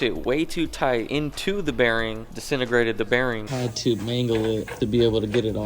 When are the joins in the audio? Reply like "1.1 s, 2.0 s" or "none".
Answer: 1.1 s, 3.5 s, 4.7 s